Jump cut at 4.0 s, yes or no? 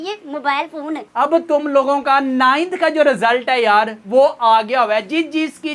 no